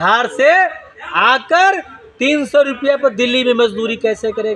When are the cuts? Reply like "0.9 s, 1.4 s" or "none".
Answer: none